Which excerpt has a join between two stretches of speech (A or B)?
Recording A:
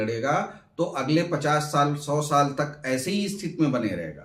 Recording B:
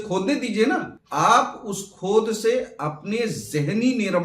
B